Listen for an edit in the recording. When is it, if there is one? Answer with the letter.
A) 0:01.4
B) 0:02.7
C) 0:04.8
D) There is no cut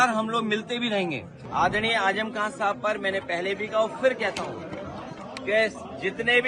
A